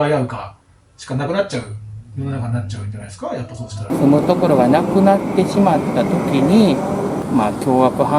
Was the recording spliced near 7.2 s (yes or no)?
yes